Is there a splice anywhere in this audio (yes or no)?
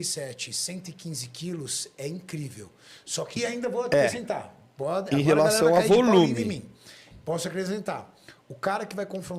yes